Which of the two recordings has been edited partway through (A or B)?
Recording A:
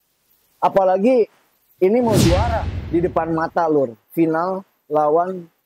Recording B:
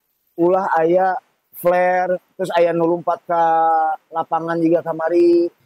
A